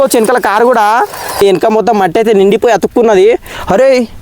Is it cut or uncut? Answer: cut